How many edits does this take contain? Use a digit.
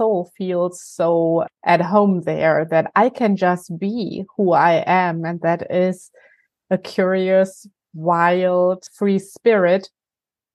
2